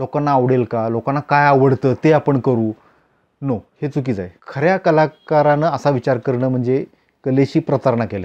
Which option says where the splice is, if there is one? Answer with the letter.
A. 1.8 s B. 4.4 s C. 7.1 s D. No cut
B